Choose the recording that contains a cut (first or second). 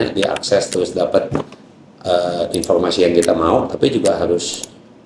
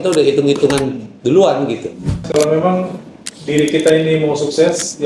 second